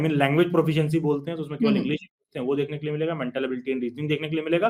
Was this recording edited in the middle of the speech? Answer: no; 0 cuts

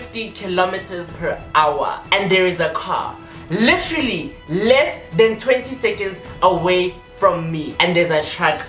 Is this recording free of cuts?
no; 1 cut; at 7.7 s

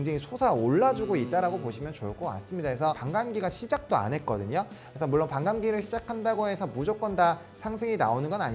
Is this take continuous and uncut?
no; 1 cut; at 3.0 s

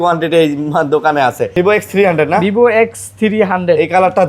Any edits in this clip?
yes; 1 cut; at 1.4 s

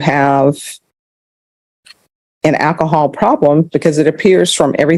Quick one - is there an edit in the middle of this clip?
no; 0 cuts

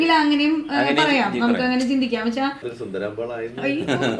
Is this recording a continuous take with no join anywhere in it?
no; 1 cut; at 2.7 s

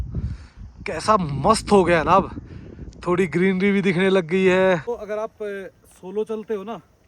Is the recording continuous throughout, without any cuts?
no; 1 cut; at 4.9 s

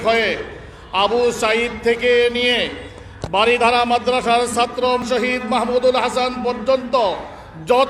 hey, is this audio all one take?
no; 1 cut; at 5.0 s

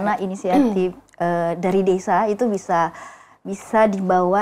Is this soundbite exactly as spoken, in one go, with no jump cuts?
yes; 0 cuts

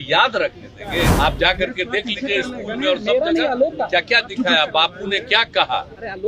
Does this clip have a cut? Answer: yes; 1 cut; at 1.1 s

